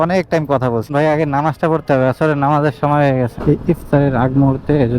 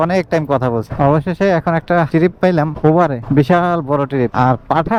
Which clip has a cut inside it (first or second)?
first